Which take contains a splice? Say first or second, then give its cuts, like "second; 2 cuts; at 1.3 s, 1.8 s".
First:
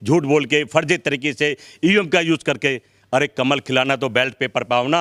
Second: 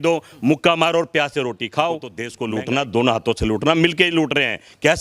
second; 1 cut; at 2.3 s